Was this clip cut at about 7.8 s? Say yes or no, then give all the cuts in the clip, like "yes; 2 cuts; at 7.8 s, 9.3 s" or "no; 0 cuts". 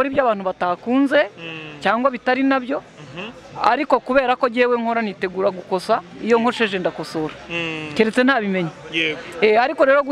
no; 0 cuts